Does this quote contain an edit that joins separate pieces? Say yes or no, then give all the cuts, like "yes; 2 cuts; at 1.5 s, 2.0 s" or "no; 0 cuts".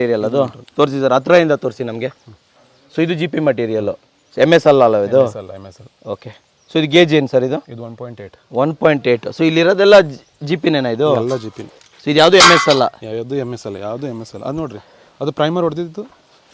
no; 0 cuts